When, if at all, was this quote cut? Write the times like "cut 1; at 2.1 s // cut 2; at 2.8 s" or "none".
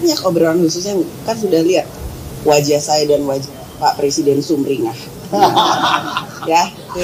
none